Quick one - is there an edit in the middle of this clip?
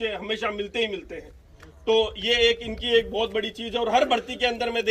no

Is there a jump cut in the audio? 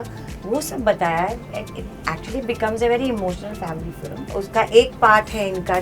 yes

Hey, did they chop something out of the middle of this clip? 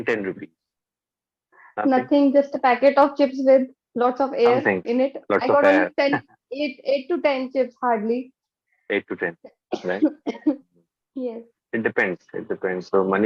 no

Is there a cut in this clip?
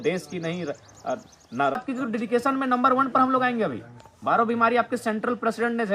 yes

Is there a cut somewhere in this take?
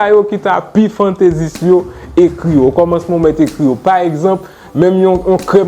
no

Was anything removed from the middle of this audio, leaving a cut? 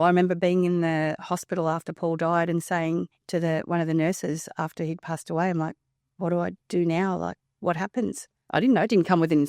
yes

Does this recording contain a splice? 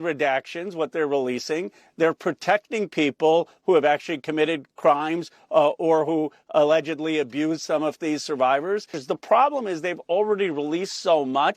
yes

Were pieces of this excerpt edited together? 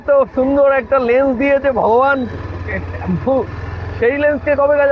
no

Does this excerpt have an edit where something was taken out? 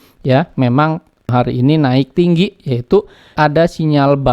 yes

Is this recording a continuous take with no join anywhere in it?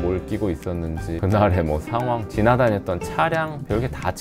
no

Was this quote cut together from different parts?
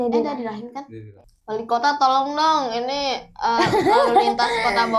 yes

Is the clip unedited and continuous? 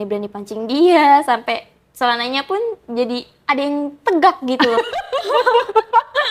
yes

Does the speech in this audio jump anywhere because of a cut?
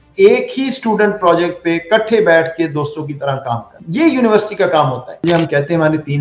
yes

